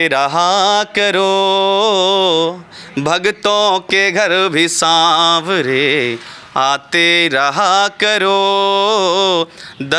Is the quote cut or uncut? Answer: uncut